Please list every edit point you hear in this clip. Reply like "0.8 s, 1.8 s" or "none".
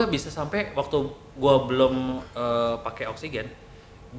none